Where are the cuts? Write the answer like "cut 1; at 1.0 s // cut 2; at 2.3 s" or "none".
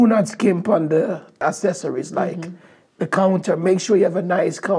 cut 1; at 1.3 s